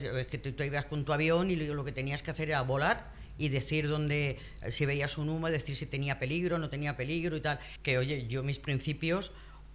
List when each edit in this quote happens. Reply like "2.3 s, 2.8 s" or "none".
7.7 s